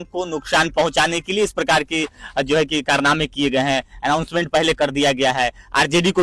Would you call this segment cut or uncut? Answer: uncut